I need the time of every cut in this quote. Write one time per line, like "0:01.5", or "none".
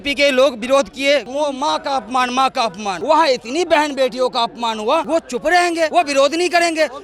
0:01.3
0:03.0
0:05.1
0:05.9